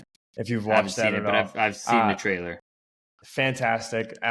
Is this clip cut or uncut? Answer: uncut